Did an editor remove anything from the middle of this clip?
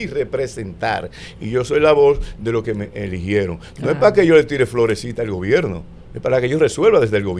no; 0 cuts

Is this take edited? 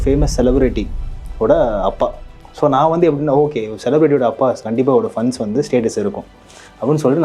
no; 0 cuts

